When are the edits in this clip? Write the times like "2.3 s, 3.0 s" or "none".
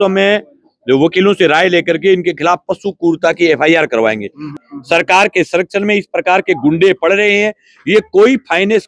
4.6 s